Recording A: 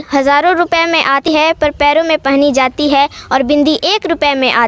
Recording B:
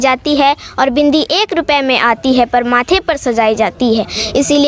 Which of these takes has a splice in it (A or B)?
A